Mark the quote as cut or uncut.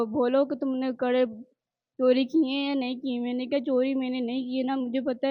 uncut